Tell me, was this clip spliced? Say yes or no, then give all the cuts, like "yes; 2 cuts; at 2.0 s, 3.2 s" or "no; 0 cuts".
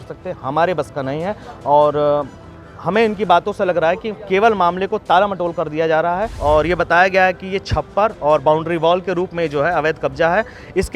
yes; 1 cut; at 6.3 s